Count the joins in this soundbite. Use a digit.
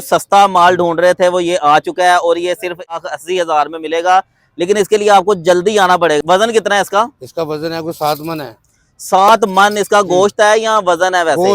2